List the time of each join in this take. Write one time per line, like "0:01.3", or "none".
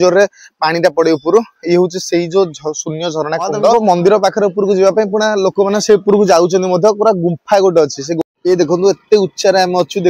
0:03.7
0:08.2